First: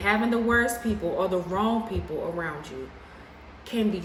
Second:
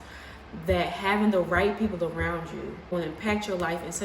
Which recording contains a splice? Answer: second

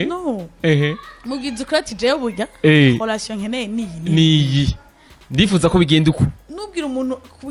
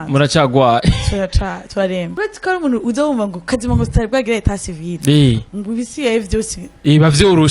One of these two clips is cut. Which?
second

